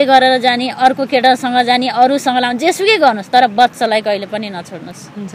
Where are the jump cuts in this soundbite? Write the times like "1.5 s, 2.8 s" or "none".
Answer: none